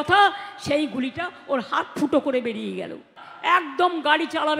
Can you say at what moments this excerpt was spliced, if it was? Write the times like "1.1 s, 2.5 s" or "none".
3.3 s